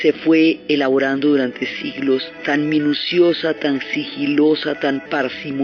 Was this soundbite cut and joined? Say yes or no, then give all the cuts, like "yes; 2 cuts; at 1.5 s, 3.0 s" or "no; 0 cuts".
no; 0 cuts